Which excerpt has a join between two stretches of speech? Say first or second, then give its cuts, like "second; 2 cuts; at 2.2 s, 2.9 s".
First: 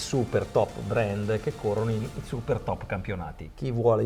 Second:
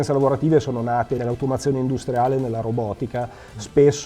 second; 1 cut; at 1.2 s